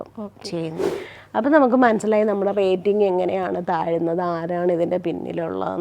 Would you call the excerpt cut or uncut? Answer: cut